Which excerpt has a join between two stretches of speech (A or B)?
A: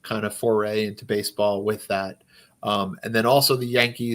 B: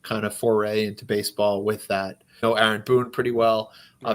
B